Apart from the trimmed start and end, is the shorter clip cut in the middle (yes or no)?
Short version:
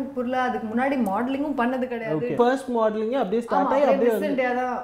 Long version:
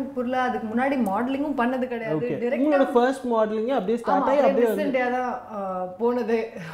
yes